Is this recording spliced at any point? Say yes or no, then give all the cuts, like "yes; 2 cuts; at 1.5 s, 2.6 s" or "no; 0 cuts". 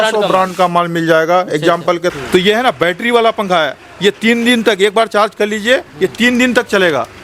yes; 1 cut; at 2.1 s